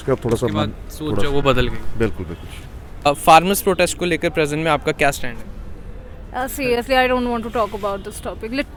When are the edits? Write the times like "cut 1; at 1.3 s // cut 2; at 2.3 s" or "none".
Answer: none